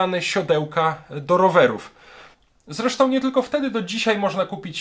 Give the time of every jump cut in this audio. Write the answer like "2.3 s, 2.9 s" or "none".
none